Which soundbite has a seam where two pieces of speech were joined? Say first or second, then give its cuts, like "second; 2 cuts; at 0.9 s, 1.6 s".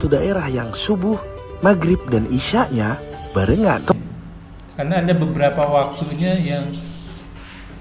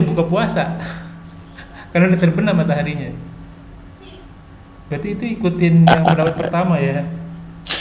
first; 1 cut; at 3.9 s